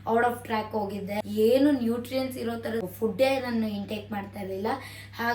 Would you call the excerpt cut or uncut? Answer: cut